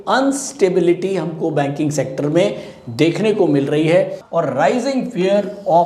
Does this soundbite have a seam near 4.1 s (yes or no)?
yes